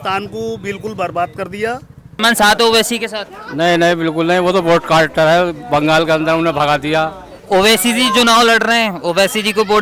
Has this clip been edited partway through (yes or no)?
yes